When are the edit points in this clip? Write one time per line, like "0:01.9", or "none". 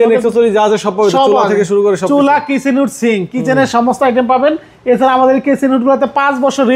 none